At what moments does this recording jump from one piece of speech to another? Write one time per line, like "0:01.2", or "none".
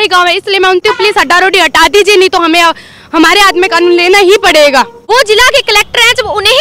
0:00.8
0:05.0